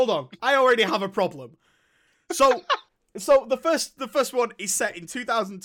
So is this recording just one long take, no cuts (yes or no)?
yes